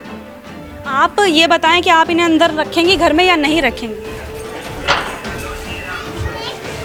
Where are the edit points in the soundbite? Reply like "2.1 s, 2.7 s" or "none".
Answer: none